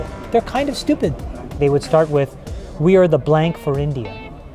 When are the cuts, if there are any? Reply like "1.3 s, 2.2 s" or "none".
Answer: 1.6 s

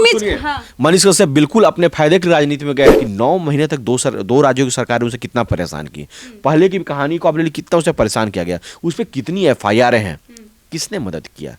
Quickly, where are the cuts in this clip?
2.9 s

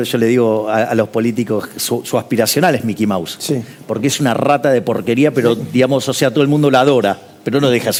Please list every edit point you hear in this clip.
none

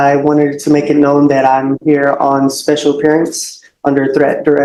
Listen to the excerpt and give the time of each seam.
none

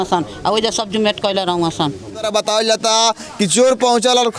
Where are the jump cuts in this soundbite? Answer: 2.3 s

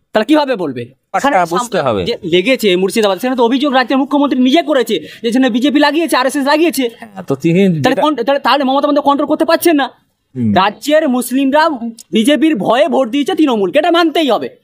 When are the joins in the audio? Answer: 1.0 s

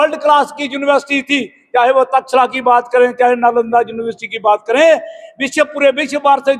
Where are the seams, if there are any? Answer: none

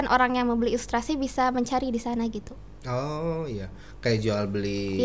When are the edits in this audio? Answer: none

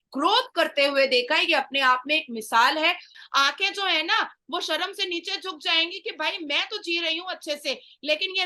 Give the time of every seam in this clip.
3.1 s

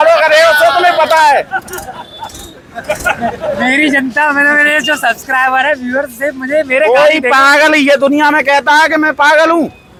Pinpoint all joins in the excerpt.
none

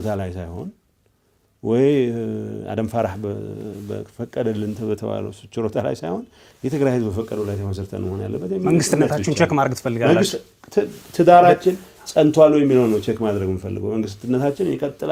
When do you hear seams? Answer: none

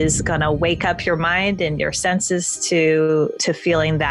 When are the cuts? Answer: none

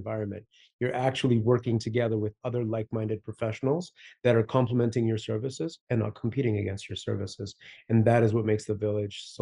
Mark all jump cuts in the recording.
none

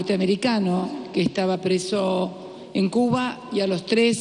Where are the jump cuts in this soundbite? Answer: none

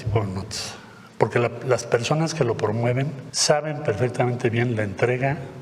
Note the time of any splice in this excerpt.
3.2 s

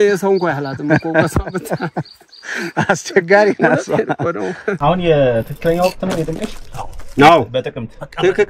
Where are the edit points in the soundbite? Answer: 4.7 s

